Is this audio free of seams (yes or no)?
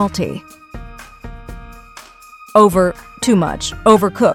yes